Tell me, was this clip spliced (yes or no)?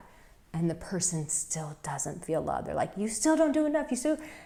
no